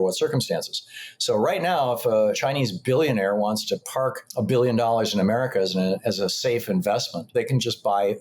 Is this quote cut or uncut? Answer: cut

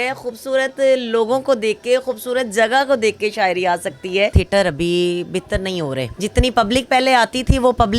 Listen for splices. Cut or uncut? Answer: cut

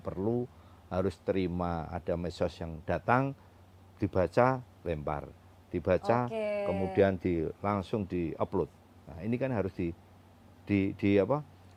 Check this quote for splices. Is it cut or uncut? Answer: uncut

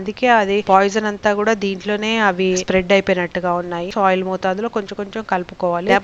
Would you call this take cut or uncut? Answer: cut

